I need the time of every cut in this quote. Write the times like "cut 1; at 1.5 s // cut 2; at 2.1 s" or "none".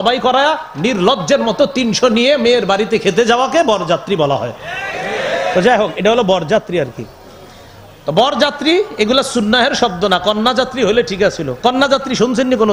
none